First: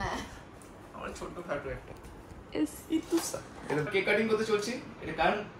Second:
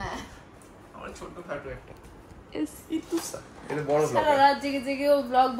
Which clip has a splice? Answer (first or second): first